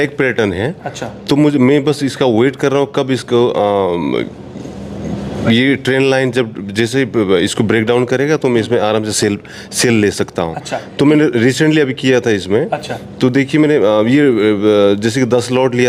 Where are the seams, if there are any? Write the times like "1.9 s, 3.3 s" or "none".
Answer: none